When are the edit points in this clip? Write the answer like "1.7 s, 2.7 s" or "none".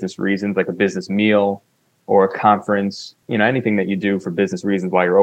3.1 s